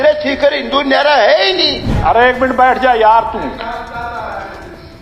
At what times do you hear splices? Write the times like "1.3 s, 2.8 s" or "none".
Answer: 1.9 s